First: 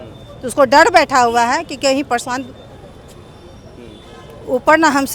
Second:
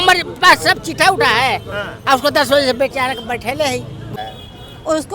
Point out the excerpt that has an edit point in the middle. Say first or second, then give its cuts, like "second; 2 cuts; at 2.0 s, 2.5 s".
second; 1 cut; at 4.1 s